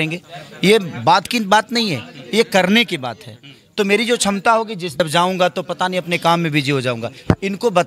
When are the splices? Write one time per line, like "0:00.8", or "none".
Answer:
0:05.0